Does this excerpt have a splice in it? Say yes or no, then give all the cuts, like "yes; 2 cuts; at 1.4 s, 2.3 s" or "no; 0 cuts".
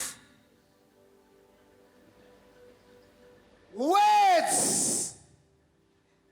yes; 1 cut; at 2.1 s